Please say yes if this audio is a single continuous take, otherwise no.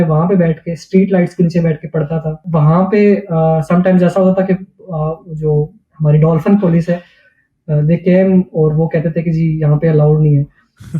no